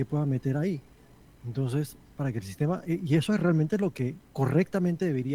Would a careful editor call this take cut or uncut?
uncut